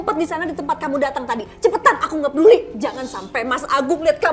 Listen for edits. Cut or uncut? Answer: uncut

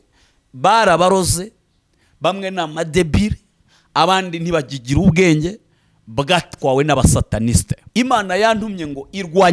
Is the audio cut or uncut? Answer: cut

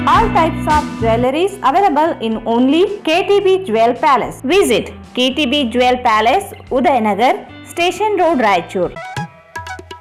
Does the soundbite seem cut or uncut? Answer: uncut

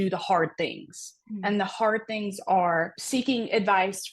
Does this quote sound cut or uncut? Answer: cut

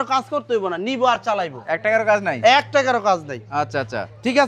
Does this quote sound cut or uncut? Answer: uncut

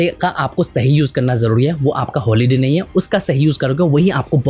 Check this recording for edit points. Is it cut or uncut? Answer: uncut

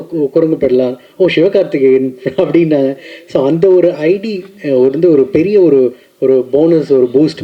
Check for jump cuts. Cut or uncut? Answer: uncut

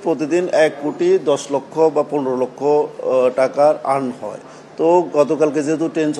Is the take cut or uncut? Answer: uncut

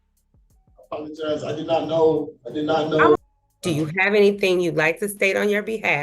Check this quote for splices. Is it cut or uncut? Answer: cut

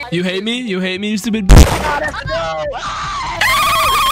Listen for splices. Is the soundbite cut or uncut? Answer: cut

